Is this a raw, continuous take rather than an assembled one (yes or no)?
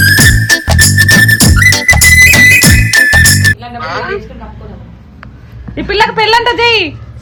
yes